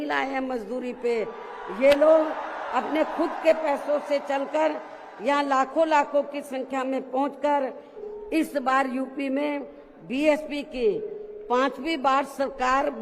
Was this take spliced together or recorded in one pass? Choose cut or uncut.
cut